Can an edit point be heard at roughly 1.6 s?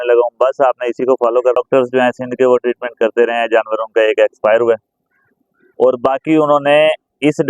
yes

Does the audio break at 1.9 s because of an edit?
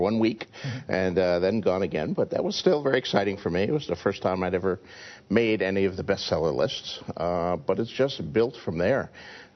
yes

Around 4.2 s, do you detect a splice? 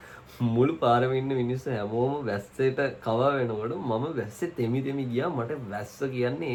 no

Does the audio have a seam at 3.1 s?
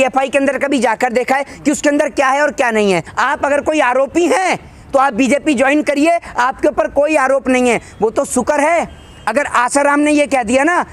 yes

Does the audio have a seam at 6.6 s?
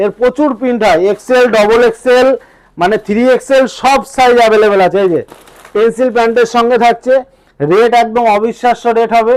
no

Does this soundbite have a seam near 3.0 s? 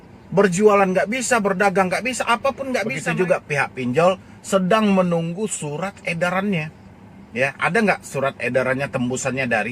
yes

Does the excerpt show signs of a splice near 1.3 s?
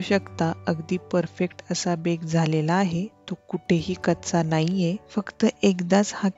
no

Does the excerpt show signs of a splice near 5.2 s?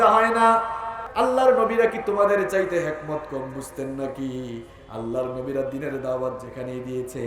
no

